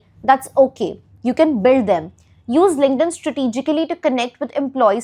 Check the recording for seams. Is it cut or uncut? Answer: uncut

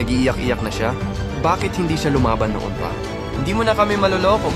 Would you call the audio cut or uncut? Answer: uncut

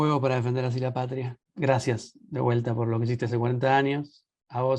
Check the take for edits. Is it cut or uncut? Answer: cut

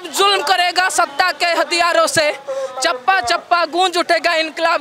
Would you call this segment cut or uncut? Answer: uncut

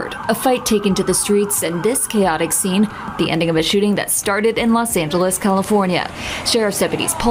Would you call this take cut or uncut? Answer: uncut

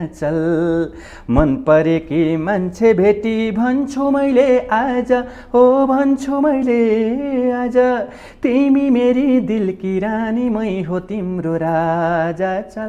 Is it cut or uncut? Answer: uncut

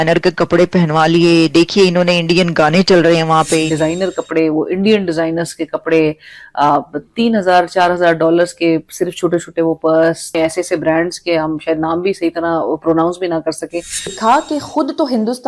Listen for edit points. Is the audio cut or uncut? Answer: cut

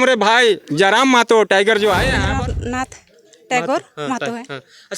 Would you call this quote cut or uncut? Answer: cut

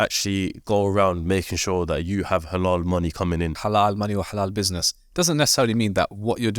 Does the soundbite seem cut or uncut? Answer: cut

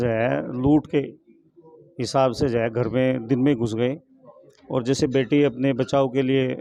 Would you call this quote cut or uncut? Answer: uncut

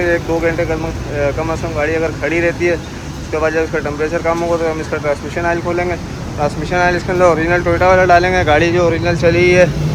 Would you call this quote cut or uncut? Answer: uncut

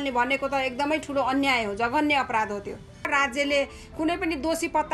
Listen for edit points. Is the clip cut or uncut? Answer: cut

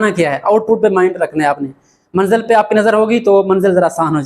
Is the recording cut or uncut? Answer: uncut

